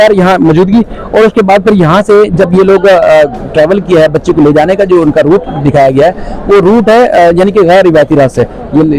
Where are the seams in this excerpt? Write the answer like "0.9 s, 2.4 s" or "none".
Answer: none